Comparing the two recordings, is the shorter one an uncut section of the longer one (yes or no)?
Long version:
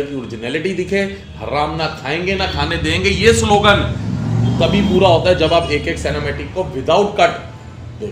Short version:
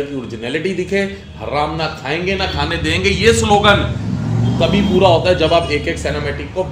yes